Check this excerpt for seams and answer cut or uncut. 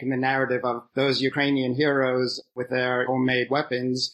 uncut